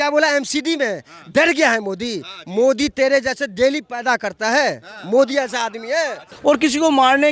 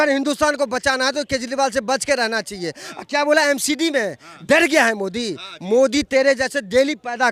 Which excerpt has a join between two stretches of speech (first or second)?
first